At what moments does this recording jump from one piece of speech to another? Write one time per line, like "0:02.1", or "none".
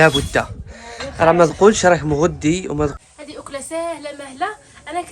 0:02.9